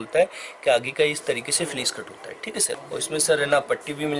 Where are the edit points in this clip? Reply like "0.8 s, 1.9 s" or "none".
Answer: 2.7 s